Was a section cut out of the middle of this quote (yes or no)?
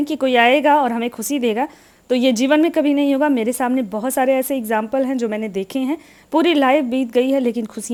no